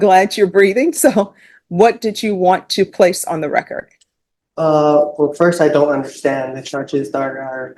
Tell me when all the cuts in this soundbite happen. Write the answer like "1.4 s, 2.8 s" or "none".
none